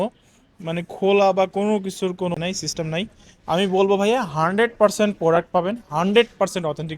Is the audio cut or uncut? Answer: cut